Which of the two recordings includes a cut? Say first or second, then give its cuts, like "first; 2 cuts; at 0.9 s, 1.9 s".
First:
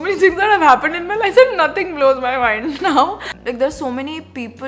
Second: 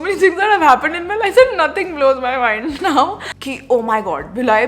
second; 1 cut; at 3.3 s